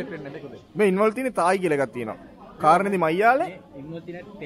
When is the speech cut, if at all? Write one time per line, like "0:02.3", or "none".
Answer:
none